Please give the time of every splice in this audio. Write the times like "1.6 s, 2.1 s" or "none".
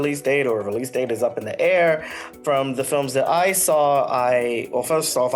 2.3 s